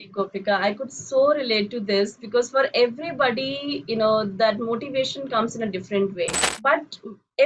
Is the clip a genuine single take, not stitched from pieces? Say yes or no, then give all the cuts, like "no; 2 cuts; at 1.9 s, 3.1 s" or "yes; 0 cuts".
no; 1 cut; at 6.4 s